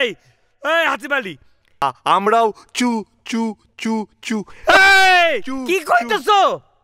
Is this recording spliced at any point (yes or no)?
yes